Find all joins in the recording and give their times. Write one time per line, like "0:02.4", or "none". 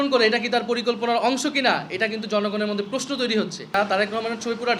0:03.7